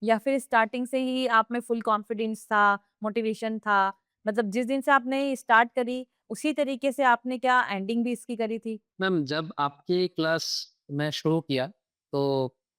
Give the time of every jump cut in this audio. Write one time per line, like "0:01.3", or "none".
0:08.9